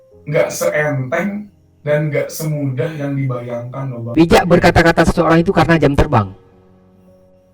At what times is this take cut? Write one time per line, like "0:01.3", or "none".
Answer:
0:04.0

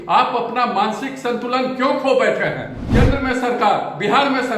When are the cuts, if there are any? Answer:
0:02.7

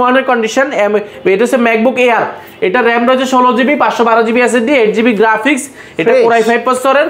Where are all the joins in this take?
none

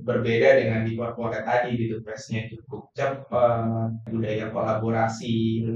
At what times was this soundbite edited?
0:04.1

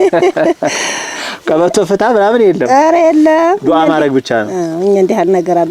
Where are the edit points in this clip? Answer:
none

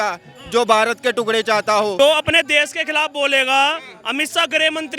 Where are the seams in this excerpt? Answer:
0:01.9

